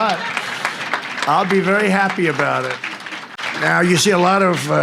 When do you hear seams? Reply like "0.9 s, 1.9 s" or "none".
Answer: 3.5 s

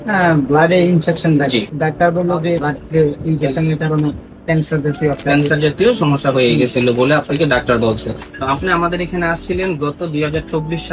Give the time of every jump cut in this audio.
1.7 s, 2.7 s, 8.3 s

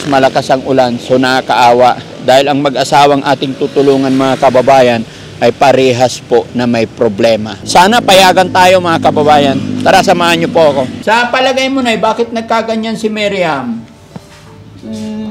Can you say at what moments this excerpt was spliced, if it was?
7.5 s, 11.0 s

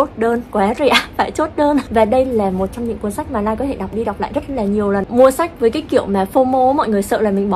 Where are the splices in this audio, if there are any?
1.9 s, 5.1 s

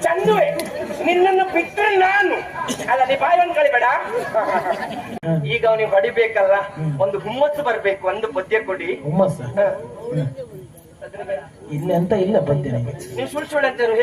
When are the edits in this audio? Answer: 5.1 s

